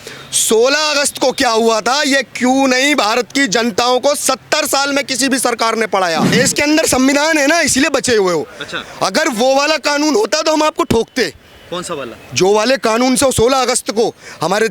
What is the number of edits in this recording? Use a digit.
1